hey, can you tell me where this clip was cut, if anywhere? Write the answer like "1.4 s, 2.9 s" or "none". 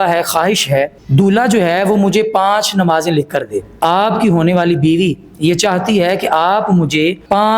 1.0 s, 3.7 s